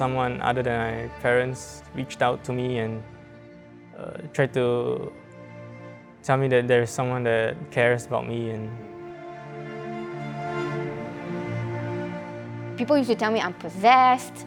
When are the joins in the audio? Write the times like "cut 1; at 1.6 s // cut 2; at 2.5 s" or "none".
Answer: none

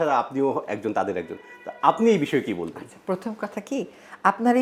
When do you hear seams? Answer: none

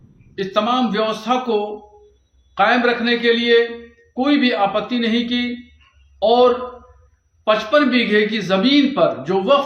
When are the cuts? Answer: none

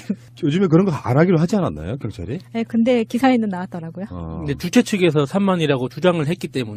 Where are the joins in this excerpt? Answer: none

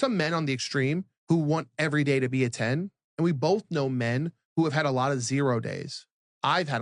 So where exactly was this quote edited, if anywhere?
cut 1; at 3.5 s

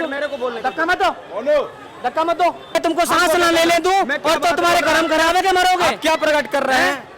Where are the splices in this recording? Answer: cut 1; at 2.8 s

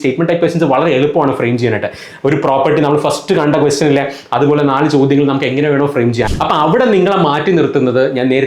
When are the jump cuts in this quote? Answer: cut 1; at 6.3 s

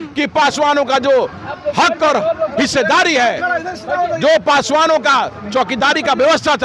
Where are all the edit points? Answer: none

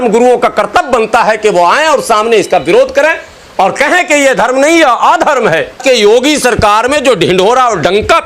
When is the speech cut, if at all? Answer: cut 1; at 5.8 s

